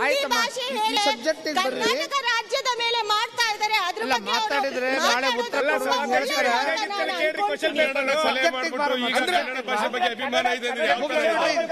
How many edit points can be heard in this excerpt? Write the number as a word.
one